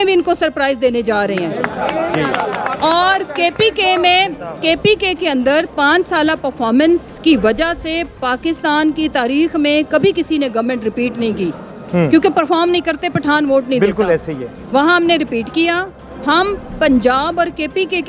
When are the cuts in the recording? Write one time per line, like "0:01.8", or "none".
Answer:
none